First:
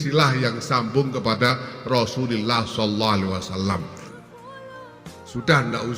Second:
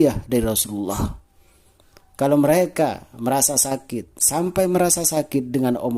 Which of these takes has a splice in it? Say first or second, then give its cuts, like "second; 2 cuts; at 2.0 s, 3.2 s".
first; 1 cut; at 4.0 s